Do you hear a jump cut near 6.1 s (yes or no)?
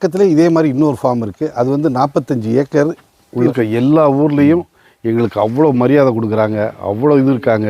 no